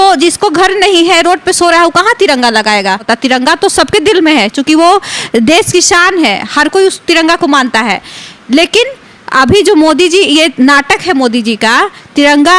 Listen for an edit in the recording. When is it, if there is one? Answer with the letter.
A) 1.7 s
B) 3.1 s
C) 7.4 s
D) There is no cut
B